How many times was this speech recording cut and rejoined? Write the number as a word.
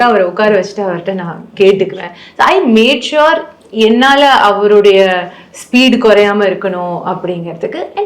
zero